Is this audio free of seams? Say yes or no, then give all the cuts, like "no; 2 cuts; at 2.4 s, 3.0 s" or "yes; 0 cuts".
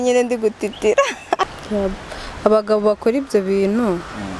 no; 1 cut; at 1.6 s